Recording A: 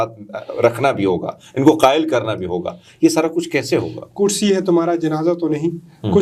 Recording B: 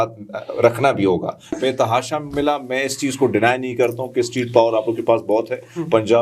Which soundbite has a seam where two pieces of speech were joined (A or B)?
B